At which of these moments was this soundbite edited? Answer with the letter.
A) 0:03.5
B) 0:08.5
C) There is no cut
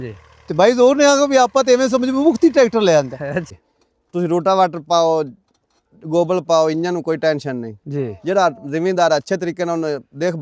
A